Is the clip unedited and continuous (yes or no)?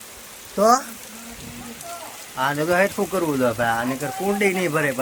yes